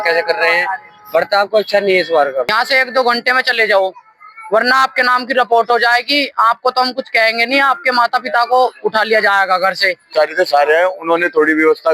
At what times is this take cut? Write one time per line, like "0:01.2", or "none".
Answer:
0:02.5
0:10.1